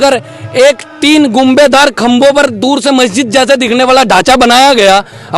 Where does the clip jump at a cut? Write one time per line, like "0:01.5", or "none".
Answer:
none